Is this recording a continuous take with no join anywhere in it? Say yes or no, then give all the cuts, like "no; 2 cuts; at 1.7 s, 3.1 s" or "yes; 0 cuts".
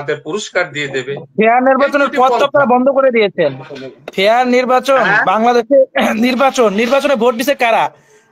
yes; 0 cuts